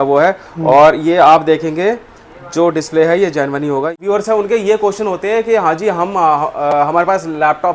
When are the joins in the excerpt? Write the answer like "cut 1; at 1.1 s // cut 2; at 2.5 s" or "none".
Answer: cut 1; at 4.0 s

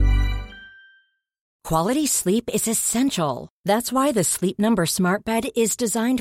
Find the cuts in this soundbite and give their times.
cut 1; at 1.5 s

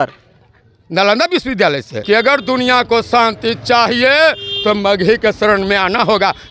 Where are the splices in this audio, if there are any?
cut 1; at 1.9 s

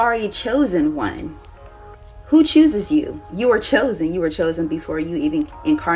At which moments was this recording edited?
none

